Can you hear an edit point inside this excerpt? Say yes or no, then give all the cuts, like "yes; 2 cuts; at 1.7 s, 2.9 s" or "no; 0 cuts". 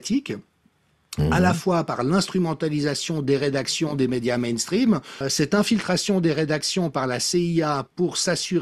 yes; 1 cut; at 5.2 s